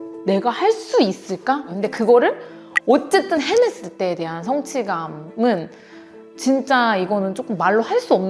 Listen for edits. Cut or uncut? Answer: cut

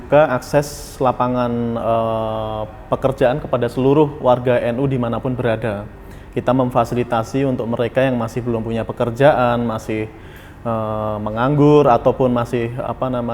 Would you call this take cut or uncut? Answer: uncut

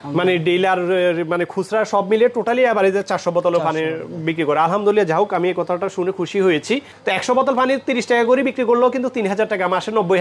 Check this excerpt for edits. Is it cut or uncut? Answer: cut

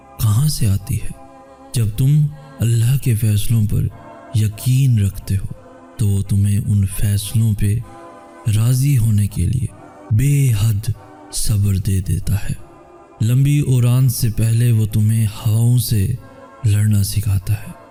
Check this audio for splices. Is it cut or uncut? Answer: uncut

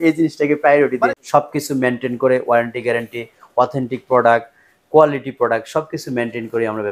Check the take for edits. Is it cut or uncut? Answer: cut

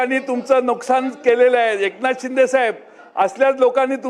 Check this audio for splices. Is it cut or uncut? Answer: uncut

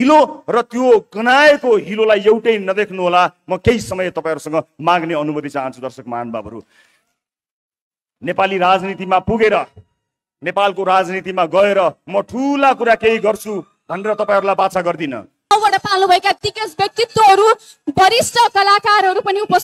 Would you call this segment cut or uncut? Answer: cut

